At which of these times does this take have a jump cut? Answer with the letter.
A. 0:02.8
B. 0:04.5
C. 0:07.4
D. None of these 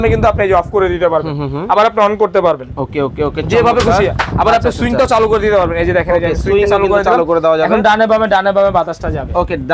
D